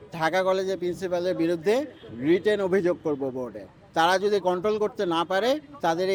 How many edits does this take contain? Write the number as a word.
zero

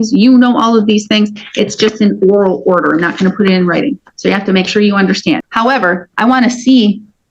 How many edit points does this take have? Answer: one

